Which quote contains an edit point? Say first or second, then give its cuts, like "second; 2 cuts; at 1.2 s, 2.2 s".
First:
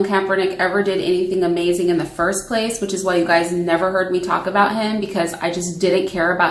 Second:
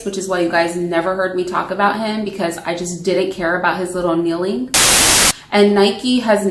second; 1 cut; at 5.1 s